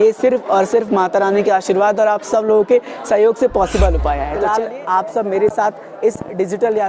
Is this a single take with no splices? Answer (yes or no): no